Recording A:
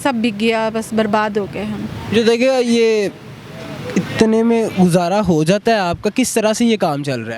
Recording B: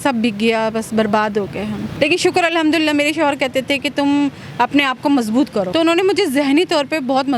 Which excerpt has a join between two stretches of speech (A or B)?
B